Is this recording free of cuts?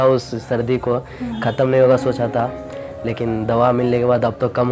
yes; 0 cuts

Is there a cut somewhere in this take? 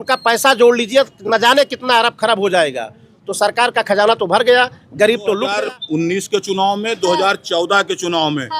yes; 1 cut; at 5.5 s

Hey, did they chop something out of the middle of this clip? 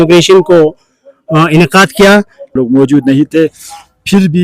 yes; 1 cut; at 2.5 s

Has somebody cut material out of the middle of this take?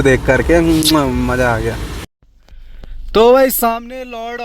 yes; 1 cut; at 2.0 s

